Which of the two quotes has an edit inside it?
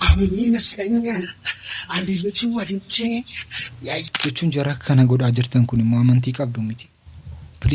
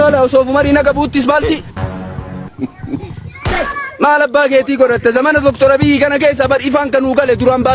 first; 1 cut; at 4.0 s

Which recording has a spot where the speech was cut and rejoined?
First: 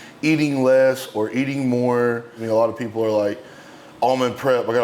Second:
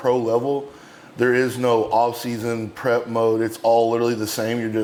first; 1 cut; at 2.4 s

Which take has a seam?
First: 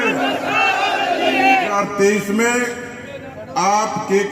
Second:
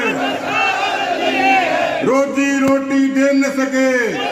first; 1 cut; at 1.7 s

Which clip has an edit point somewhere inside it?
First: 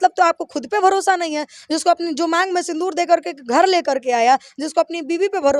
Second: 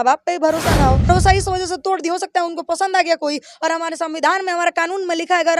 second; 1 cut; at 1.1 s

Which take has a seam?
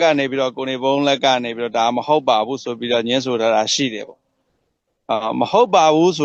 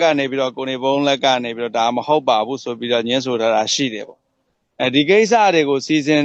second; 1 cut; at 5.1 s

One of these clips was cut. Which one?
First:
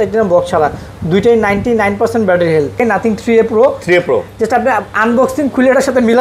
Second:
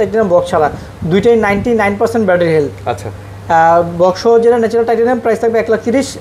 first; 1 cut; at 2.8 s

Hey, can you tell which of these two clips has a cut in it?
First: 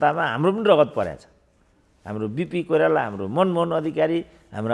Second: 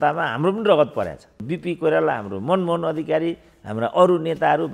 second; 1 cut; at 1.4 s

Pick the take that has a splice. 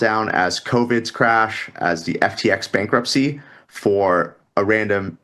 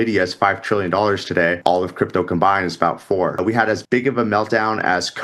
second; 2 cuts; at 1.6 s, 3.5 s

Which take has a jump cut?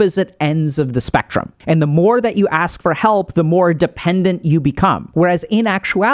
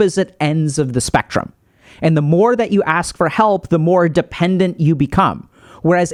first; 2 cuts; at 1.5 s, 5.0 s

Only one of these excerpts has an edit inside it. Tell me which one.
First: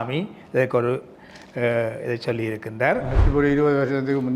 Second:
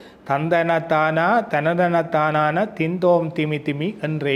first; 1 cut; at 3.2 s

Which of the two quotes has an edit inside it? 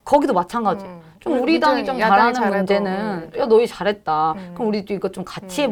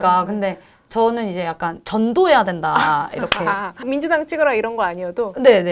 second; 1 cut; at 3.8 s

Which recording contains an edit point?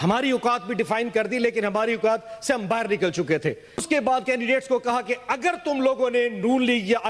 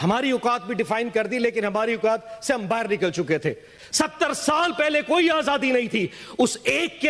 second; 1 cut; at 3.7 s

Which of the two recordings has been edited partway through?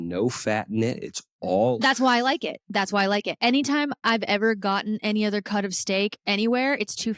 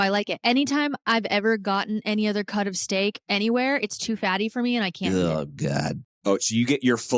second; 1 cut; at 6.1 s

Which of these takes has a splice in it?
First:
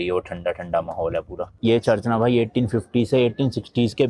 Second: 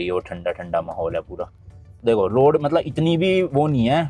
first; 1 cut; at 1.6 s

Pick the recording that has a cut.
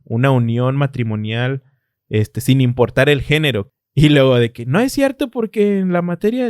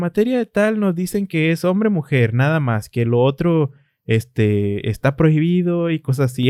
first; 1 cut; at 3.7 s

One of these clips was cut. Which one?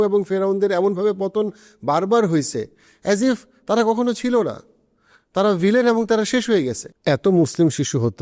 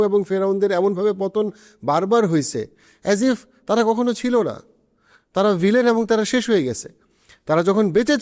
first; 1 cut; at 6.9 s

